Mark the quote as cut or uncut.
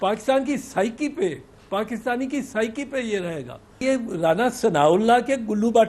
cut